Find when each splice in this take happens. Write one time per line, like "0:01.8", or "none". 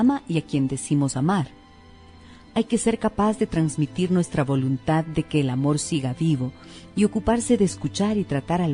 0:05.8